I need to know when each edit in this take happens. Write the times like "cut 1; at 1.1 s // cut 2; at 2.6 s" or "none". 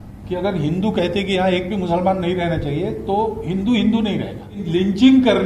cut 1; at 4.5 s